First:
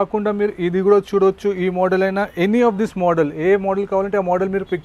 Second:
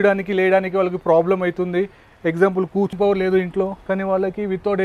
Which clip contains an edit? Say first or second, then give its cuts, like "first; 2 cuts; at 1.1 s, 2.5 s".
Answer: second; 1 cut; at 2.9 s